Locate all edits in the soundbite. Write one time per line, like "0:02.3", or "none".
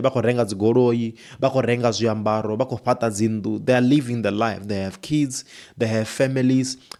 none